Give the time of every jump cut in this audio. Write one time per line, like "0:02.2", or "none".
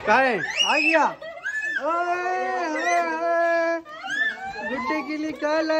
none